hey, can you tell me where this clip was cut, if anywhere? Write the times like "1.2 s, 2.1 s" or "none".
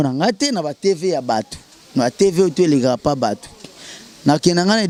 none